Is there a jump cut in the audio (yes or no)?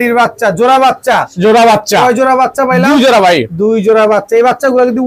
no